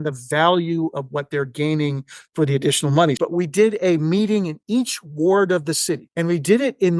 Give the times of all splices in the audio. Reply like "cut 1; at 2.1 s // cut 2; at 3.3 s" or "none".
cut 1; at 3.2 s // cut 2; at 6.1 s